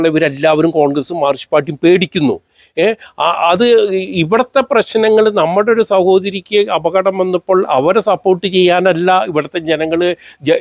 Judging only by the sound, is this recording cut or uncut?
uncut